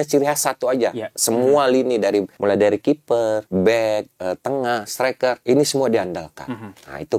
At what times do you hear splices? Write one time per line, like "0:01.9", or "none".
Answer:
0:01.1
0:02.3
0:03.5
0:05.4